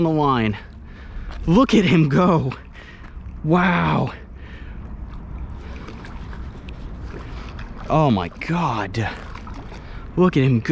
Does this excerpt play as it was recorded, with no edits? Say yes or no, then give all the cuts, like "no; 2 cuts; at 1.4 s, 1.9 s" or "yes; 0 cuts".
yes; 0 cuts